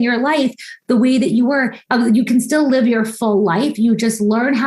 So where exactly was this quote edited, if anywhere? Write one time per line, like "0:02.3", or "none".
0:01.8